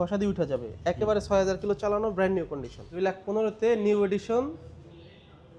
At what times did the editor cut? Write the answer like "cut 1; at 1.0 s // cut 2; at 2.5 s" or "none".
cut 1; at 2.9 s